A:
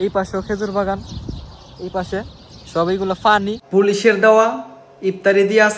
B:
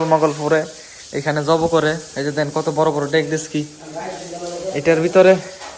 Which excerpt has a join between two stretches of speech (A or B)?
A